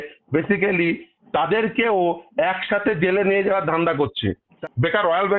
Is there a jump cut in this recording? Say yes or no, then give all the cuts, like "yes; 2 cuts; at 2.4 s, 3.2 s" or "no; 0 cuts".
yes; 1 cut; at 4.2 s